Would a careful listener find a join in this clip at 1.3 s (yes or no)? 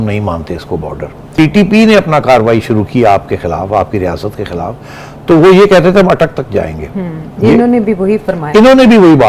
yes